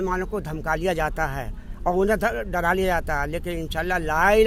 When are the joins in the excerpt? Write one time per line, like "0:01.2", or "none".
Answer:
none